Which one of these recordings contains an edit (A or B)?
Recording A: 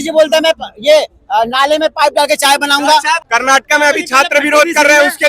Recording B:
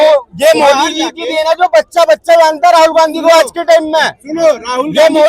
A